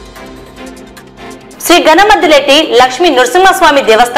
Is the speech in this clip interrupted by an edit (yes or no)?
yes